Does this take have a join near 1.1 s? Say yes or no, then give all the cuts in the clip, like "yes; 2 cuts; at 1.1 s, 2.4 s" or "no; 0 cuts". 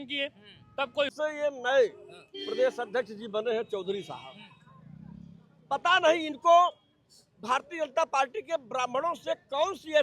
yes; 1 cut; at 1.1 s